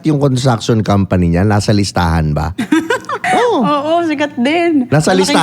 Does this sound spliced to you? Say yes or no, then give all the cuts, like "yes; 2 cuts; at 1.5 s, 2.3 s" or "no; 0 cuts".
yes; 1 cut; at 3.2 s